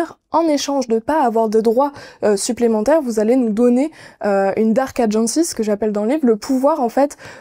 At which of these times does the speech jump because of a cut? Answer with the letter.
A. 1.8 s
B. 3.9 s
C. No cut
C